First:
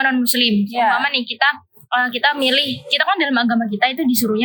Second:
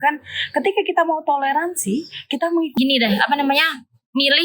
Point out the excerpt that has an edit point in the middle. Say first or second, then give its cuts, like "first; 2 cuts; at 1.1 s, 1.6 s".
second; 1 cut; at 2.8 s